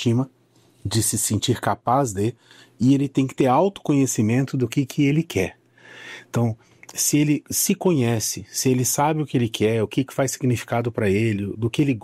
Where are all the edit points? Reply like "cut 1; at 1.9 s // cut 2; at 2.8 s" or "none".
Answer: none